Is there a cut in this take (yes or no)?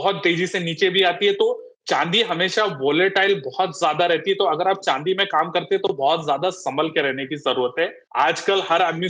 yes